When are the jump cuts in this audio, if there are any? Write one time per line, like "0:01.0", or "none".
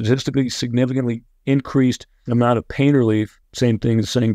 0:02.1
0:03.4